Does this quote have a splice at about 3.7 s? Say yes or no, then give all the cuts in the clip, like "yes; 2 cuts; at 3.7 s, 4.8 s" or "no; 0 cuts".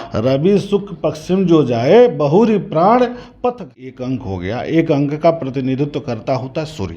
yes; 1 cut; at 3.7 s